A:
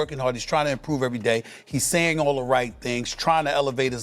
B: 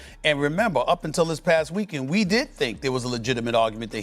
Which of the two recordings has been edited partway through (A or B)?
A